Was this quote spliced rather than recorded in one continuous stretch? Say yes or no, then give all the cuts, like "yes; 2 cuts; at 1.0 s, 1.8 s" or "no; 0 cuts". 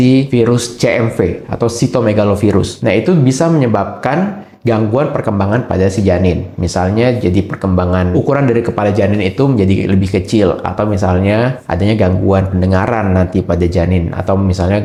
no; 0 cuts